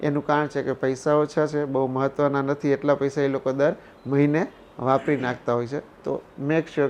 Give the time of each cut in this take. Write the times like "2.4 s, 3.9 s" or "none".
none